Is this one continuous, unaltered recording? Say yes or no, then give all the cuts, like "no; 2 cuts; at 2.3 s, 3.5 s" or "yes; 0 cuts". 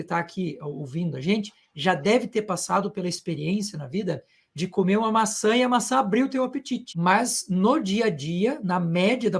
no; 1 cut; at 6.9 s